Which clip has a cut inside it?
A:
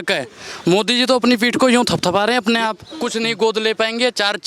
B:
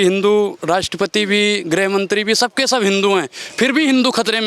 A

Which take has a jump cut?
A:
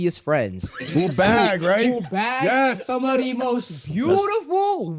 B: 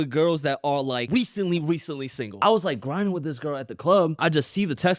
B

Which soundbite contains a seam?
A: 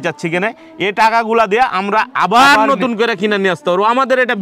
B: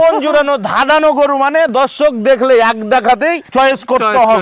B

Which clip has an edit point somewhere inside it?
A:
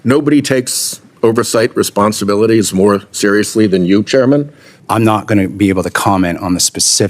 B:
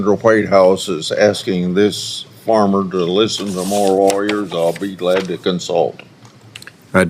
A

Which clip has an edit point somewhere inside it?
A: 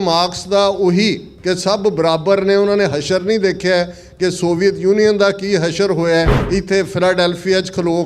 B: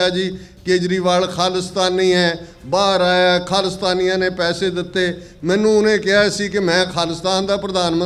A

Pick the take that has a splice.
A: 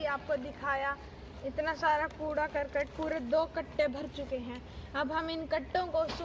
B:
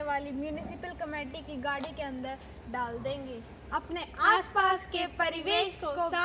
B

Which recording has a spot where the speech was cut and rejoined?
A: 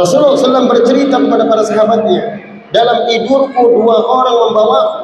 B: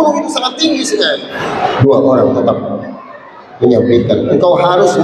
B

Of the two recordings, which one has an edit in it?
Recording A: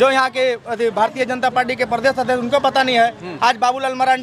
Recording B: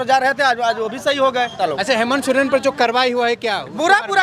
B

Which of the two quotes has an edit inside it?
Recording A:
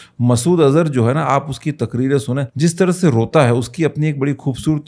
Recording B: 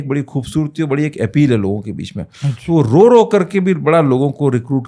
A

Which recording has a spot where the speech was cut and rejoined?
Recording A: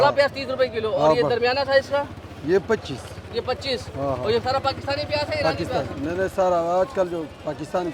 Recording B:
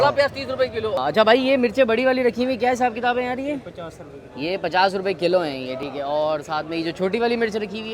B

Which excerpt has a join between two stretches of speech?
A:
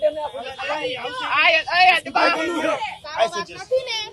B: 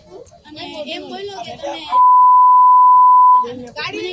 A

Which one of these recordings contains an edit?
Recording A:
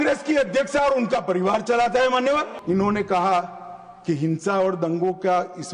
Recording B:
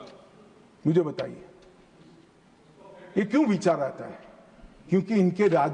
A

